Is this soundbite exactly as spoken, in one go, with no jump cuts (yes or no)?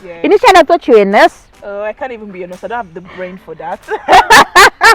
yes